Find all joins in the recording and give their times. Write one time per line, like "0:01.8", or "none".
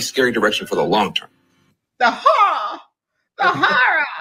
none